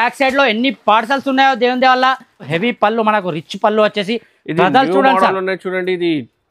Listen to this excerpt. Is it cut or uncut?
cut